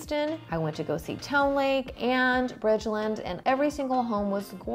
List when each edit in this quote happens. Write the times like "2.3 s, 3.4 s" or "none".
1.9 s, 3.3 s

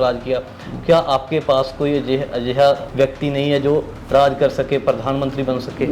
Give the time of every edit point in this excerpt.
2.9 s

